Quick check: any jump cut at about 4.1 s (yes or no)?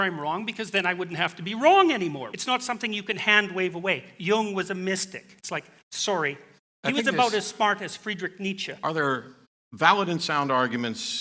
no